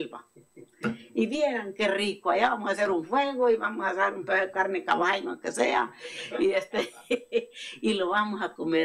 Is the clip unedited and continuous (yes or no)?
yes